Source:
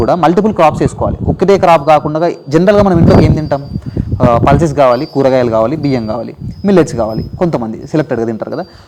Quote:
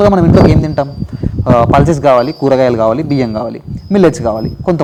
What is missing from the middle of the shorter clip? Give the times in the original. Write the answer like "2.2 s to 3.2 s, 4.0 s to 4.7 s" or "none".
none